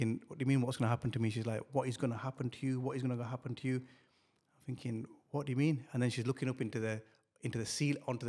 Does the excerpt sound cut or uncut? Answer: uncut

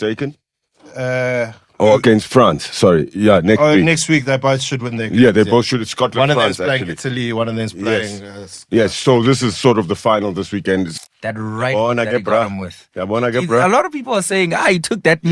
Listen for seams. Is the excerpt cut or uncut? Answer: cut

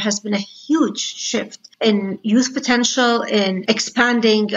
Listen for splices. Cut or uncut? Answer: cut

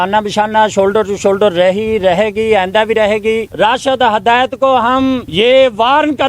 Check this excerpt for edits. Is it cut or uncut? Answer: cut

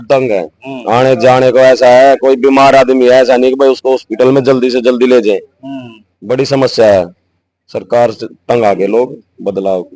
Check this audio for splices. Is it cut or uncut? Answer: uncut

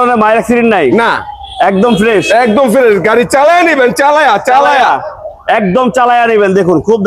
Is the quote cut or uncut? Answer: uncut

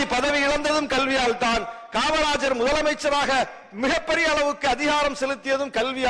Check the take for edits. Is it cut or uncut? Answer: uncut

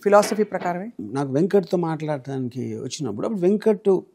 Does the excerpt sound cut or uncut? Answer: cut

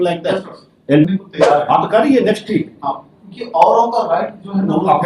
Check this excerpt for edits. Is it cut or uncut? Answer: cut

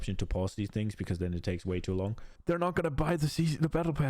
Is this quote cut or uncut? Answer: cut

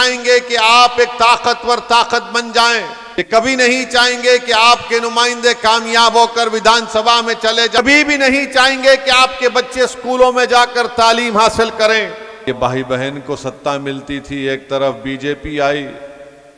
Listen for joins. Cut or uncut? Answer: cut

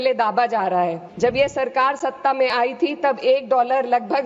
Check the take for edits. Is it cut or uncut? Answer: cut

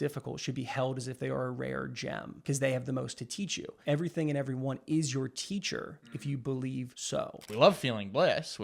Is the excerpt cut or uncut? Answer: cut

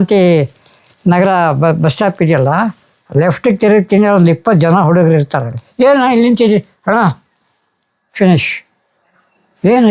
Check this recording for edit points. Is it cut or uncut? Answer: cut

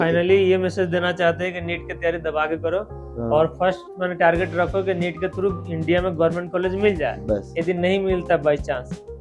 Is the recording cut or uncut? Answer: uncut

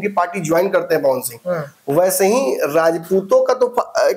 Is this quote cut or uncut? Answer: uncut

